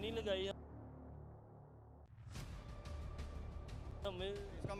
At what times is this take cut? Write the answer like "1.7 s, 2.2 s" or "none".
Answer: none